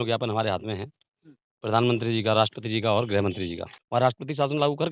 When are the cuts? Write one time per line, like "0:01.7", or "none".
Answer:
0:03.7